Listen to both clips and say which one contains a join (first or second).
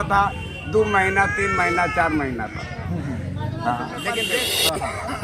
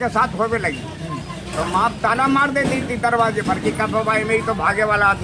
first